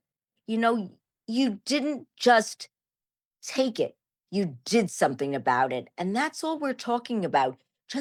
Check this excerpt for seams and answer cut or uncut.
uncut